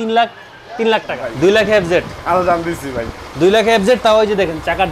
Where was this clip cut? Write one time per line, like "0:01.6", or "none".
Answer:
0:01.2

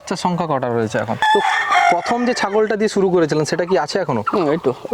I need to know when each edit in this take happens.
0:01.2

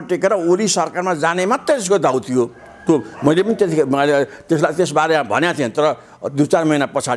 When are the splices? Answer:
none

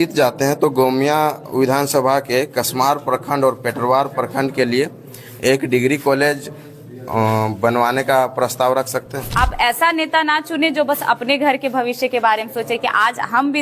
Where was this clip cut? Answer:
0:09.2

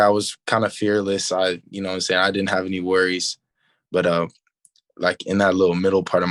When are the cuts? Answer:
none

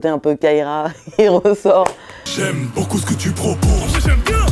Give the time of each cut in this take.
0:02.1

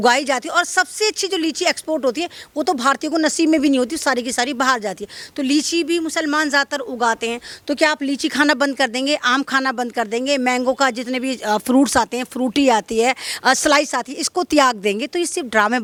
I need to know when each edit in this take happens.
none

